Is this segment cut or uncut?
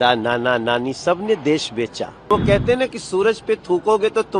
cut